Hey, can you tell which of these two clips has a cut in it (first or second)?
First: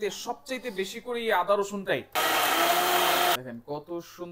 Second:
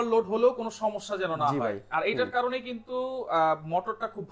first